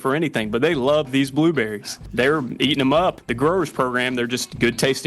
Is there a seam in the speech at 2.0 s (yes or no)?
yes